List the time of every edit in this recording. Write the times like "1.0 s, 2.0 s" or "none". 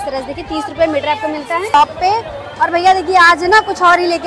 1.7 s